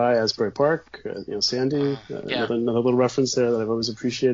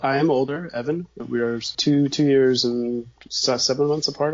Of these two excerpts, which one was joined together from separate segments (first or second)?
second